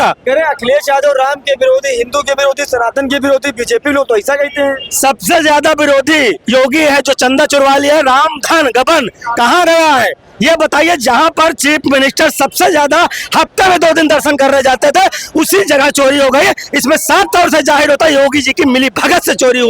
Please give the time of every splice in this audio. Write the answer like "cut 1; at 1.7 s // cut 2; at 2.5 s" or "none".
none